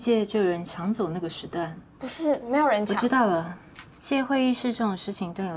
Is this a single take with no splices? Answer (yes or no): yes